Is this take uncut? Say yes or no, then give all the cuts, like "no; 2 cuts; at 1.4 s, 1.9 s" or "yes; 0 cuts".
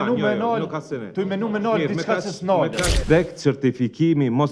no; 1 cut; at 2.9 s